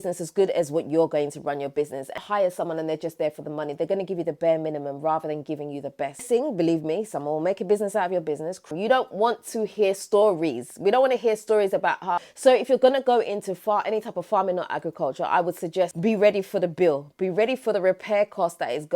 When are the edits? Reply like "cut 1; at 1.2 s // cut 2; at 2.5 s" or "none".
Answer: cut 1; at 2.2 s // cut 2; at 6.2 s // cut 3; at 8.7 s // cut 4; at 12.2 s // cut 5; at 15.9 s